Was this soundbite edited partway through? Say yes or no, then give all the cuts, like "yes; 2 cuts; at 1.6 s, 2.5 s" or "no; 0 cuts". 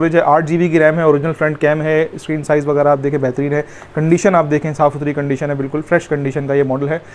no; 0 cuts